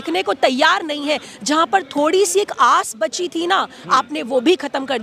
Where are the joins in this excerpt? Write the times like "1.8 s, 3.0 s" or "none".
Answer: none